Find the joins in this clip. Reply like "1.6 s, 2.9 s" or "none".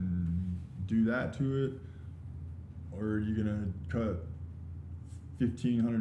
none

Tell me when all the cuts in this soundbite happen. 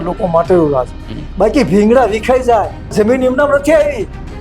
2.9 s

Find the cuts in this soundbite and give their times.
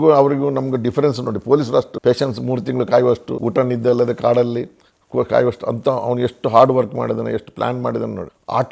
1.9 s, 3.3 s

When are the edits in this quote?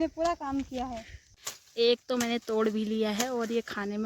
1.3 s

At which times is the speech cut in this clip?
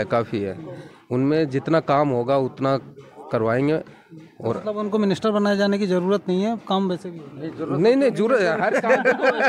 none

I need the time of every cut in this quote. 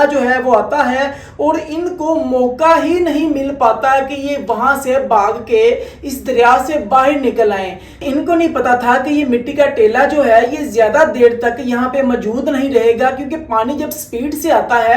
8.0 s

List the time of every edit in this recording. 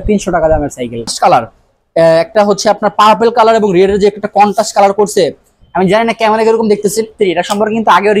1.1 s, 7.1 s

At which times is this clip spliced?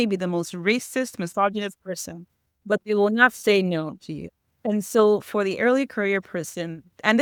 none

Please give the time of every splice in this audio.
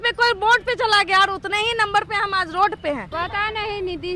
3.1 s

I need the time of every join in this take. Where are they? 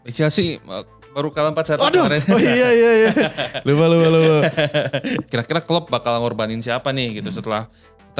5.3 s

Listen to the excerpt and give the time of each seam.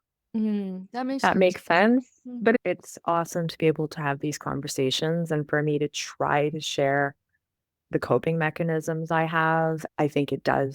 2.6 s, 9.9 s

